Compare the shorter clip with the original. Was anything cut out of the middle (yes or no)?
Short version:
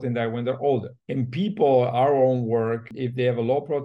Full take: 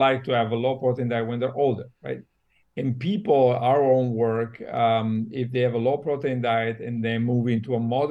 yes